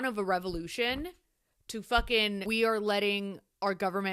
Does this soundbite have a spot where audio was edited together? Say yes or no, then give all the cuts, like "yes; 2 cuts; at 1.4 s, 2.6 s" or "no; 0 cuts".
yes; 1 cut; at 2.4 s